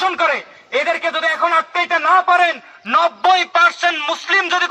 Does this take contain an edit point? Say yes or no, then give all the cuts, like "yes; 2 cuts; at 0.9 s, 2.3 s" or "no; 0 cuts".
no; 0 cuts